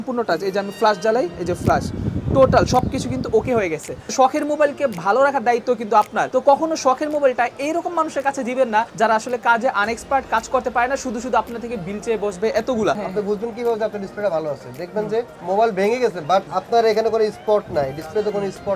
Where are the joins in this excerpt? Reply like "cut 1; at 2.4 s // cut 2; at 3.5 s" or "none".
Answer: cut 1; at 4.0 s // cut 2; at 13.0 s